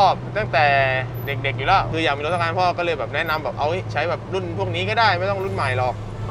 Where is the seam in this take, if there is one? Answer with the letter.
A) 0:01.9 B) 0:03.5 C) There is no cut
A